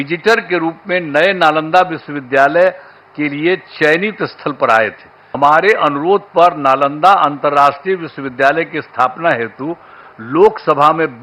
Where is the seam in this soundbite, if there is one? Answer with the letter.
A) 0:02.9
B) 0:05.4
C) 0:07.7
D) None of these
B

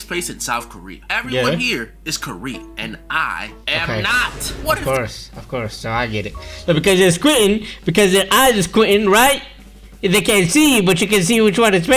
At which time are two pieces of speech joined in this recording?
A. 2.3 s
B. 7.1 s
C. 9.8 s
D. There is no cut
D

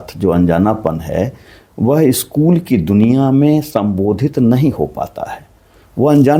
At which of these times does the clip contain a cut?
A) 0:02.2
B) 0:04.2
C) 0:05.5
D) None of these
D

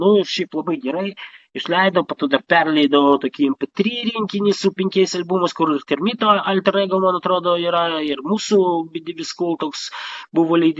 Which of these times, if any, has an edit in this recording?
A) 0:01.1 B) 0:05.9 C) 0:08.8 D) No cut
D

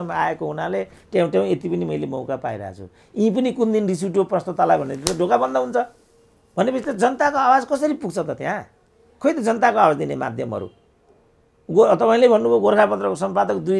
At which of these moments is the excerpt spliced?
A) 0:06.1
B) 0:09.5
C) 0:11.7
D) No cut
D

